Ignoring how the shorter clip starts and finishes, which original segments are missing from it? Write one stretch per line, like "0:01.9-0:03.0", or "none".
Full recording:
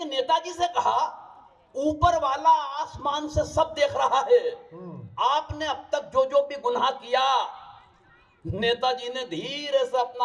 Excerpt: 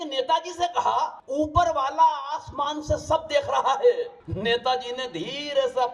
0:01.2-0:01.7
0:04.7-0:08.4